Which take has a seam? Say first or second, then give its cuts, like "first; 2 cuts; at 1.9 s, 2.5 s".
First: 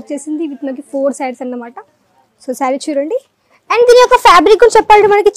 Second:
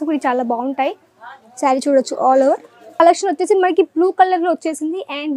second; 1 cut; at 3.0 s